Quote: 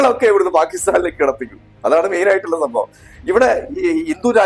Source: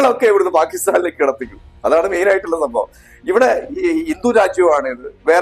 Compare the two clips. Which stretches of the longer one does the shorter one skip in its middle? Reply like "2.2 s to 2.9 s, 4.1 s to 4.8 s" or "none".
none